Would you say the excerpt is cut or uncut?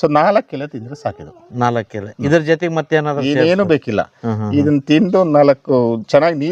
uncut